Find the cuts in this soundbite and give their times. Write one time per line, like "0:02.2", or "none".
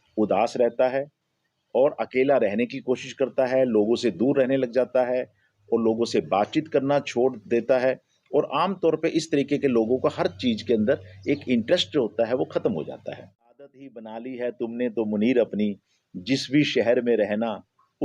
0:13.8